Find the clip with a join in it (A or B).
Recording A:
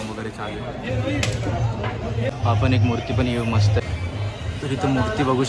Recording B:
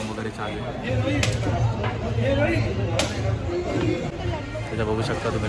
A